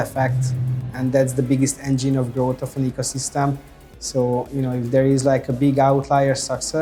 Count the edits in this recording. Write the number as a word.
zero